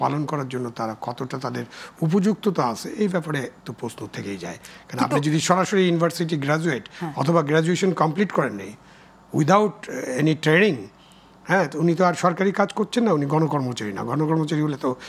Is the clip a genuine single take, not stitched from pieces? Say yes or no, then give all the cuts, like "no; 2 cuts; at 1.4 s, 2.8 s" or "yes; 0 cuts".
yes; 0 cuts